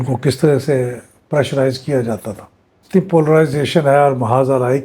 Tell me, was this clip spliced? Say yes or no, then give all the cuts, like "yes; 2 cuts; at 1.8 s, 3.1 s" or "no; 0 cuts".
yes; 1 cut; at 2.8 s